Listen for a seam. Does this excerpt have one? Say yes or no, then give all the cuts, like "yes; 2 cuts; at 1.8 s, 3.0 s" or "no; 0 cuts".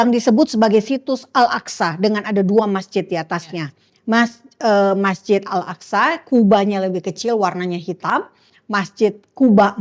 no; 0 cuts